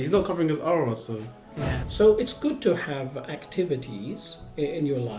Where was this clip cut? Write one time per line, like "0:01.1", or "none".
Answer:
0:01.8